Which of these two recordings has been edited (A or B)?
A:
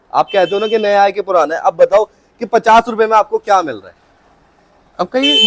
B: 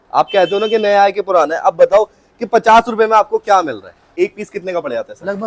B